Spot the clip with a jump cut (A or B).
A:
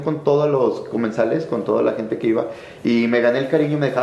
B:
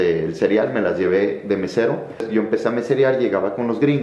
B